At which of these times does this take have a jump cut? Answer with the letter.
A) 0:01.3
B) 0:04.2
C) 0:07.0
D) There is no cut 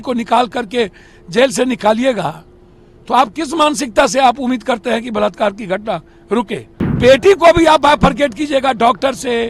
C